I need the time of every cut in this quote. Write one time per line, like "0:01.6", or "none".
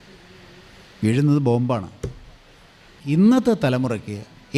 0:02.9